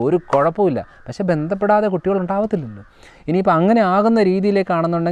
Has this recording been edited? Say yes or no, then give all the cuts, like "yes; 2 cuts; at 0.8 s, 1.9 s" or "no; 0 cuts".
no; 0 cuts